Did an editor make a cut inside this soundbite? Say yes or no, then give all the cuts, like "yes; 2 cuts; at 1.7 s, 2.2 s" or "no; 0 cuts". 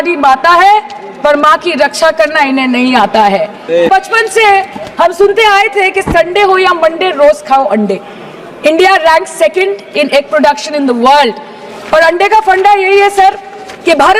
yes; 1 cut; at 3.9 s